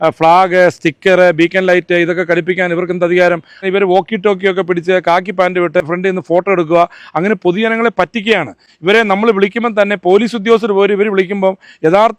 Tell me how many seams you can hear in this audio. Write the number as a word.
two